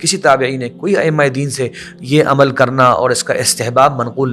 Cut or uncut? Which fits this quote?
uncut